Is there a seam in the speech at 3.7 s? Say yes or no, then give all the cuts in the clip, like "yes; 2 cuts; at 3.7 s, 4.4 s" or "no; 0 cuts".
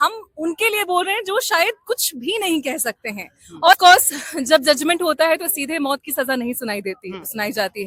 yes; 1 cut; at 3.7 s